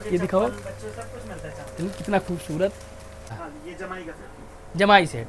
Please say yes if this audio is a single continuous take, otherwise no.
no